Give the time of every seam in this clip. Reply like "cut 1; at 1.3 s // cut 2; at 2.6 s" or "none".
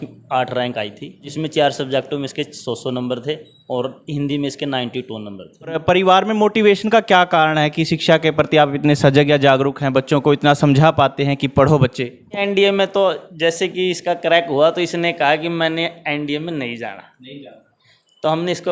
cut 1; at 1.3 s // cut 2; at 5.8 s // cut 3; at 12.4 s